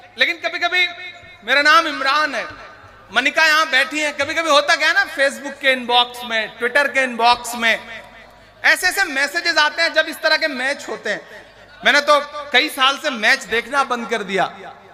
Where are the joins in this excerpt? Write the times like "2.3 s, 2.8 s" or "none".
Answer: none

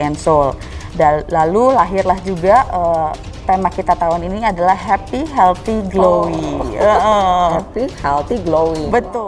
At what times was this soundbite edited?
none

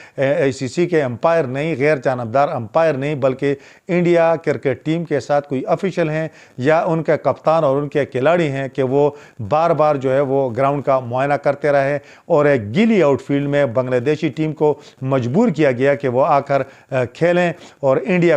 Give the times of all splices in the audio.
none

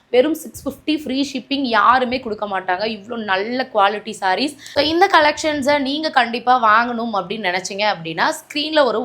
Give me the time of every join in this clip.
4.6 s

